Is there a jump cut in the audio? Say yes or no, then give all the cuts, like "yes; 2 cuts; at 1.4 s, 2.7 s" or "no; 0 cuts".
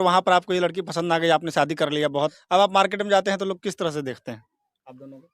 yes; 1 cut; at 2.4 s